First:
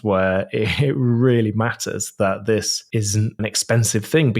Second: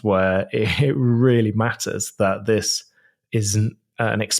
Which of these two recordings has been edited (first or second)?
first